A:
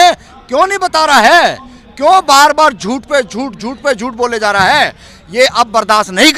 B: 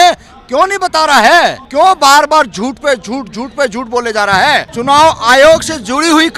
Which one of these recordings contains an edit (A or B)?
B